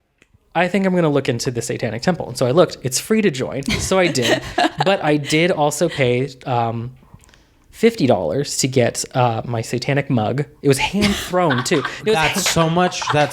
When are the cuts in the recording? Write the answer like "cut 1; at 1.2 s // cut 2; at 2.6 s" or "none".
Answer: none